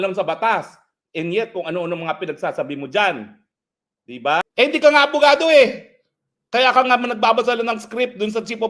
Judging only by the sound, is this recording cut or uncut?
cut